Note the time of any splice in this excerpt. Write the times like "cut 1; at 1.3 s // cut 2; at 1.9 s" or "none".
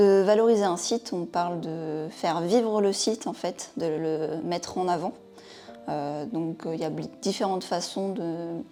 none